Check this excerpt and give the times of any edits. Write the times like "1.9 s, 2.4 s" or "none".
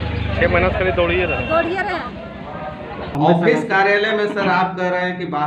3.1 s